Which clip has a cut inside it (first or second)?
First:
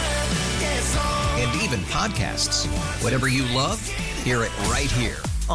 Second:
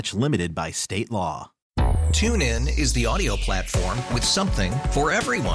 second